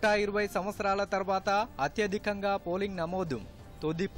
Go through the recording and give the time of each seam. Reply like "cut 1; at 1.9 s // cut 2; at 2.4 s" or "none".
none